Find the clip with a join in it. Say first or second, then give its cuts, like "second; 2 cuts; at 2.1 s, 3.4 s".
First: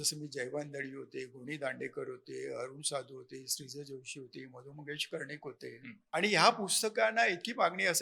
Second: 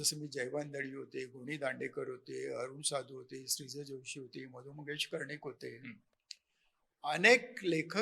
first; 1 cut; at 5.9 s